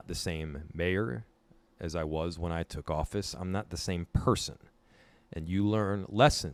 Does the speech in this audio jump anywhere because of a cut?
no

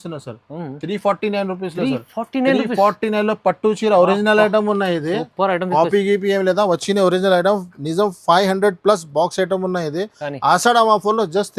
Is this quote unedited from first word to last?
yes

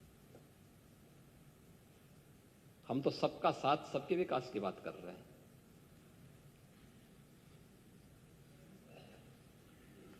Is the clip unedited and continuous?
yes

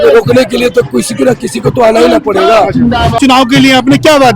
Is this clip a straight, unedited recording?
no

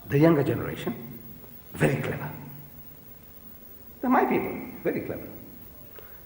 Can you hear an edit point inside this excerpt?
yes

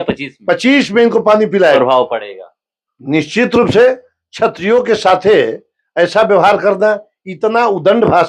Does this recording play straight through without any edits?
no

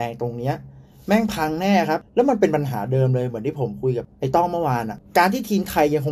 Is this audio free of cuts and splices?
no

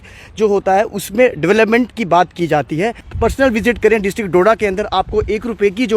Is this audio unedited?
no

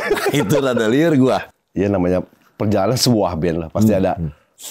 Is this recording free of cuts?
no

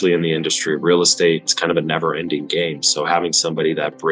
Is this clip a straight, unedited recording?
no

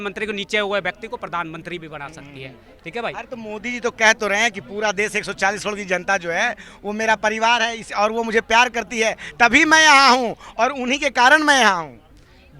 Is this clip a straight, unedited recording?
yes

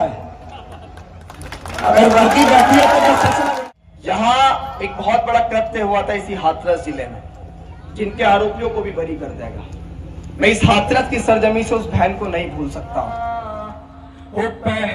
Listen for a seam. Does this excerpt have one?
yes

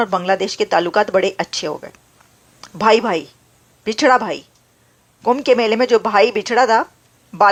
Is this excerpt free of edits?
yes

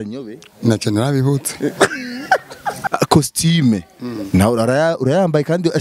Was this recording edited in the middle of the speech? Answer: yes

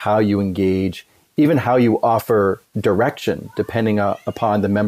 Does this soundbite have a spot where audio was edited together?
no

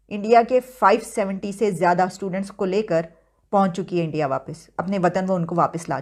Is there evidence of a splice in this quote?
no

